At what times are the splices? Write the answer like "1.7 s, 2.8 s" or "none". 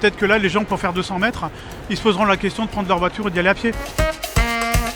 none